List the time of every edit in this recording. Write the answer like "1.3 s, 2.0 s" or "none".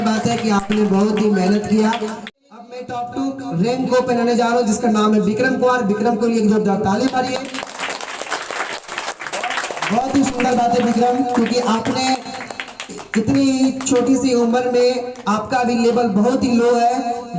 2.3 s